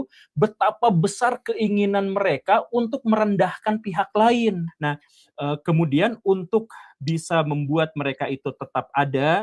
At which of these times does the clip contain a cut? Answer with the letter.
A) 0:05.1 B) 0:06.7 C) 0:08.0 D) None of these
A